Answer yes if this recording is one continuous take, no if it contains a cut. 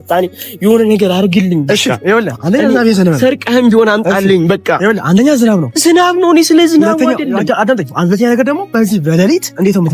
yes